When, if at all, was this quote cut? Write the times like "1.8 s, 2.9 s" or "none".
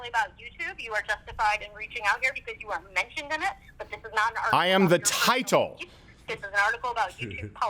none